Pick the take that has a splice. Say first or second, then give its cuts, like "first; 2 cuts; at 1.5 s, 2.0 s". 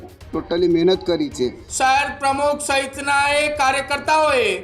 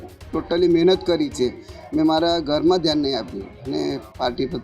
first; 1 cut; at 1.6 s